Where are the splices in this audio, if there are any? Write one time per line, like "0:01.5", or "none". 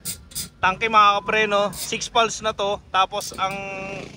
none